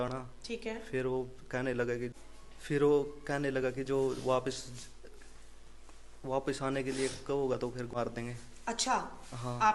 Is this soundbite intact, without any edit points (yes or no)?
yes